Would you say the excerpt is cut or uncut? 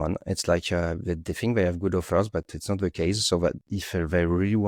uncut